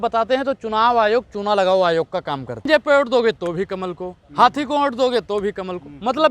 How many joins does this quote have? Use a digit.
1